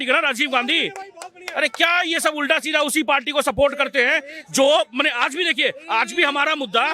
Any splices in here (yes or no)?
no